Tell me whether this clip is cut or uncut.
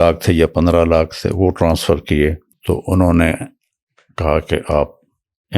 cut